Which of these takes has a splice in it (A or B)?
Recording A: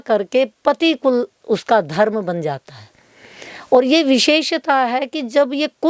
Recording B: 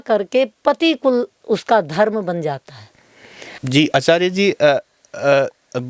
B